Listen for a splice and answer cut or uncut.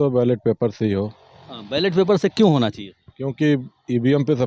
uncut